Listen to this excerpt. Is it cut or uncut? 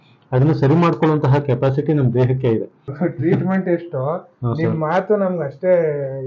cut